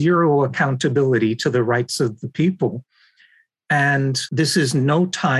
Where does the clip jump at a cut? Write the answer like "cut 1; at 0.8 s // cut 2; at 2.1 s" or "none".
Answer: cut 1; at 4.2 s